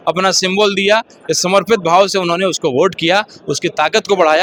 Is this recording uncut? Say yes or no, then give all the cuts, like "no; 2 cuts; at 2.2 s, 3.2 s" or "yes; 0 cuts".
yes; 0 cuts